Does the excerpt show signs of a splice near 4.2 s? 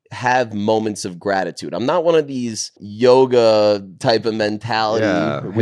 no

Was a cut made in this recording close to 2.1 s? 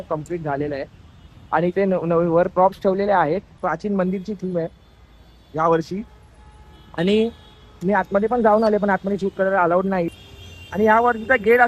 no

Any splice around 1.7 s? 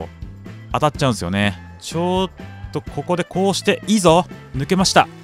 yes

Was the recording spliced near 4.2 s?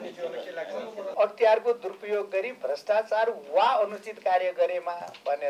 no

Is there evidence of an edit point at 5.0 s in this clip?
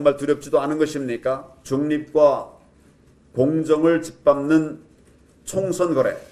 no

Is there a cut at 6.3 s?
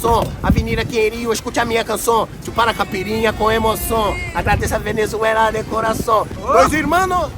yes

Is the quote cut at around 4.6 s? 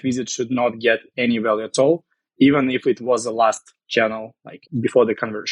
yes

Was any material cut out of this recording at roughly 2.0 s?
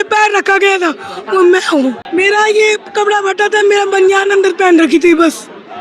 yes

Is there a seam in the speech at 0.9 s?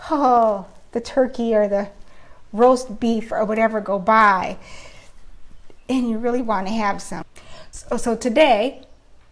no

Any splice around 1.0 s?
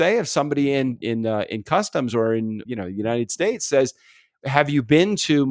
yes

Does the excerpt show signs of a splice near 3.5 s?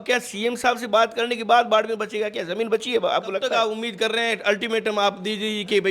yes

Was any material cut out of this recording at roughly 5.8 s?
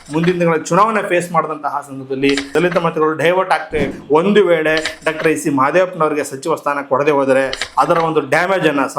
no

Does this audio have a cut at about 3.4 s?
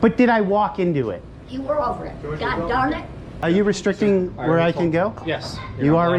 yes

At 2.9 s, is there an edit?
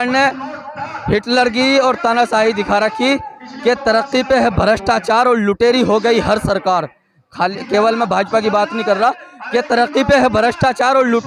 no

